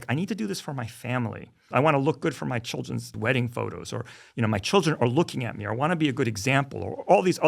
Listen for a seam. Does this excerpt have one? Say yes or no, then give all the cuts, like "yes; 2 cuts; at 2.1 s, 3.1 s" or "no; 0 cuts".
yes; 2 cuts; at 1.6 s, 3.1 s